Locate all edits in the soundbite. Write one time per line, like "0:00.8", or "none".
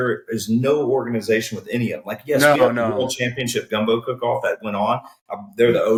none